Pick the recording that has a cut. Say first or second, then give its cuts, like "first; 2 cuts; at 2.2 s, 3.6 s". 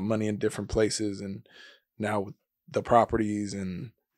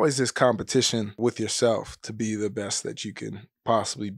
second; 1 cut; at 1.1 s